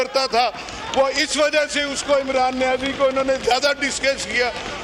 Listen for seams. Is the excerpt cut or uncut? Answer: uncut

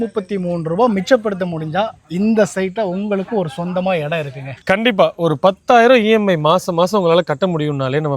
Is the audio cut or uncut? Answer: uncut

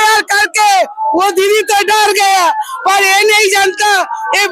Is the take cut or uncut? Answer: uncut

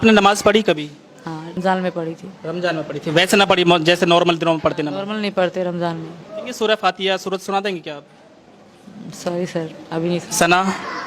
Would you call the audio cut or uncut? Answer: cut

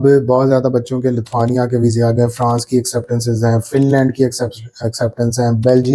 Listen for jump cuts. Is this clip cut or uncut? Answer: uncut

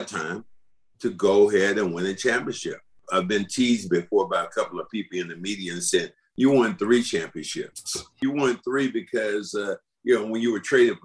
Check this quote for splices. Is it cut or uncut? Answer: cut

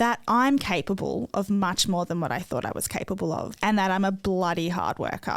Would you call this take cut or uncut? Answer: cut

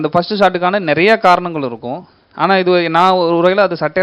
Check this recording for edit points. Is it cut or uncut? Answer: uncut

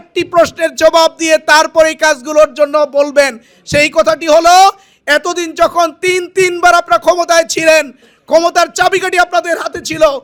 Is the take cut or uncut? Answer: uncut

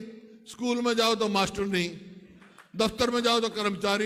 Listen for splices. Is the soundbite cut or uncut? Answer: uncut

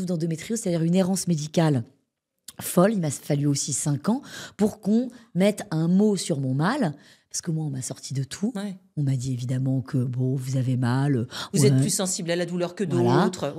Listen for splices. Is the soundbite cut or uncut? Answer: uncut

